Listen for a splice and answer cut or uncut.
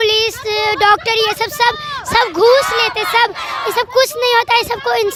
uncut